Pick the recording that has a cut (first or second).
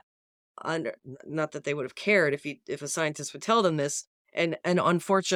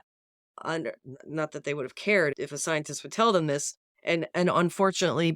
second